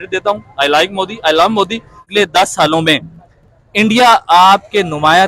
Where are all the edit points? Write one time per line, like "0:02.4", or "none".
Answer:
0:02.1